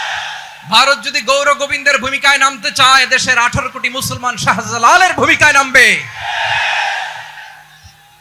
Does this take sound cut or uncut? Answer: uncut